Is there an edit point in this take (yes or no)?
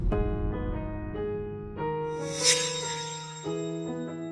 no